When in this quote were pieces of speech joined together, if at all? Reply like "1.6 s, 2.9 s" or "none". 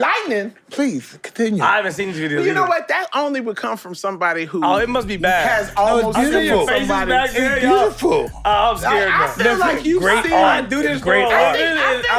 none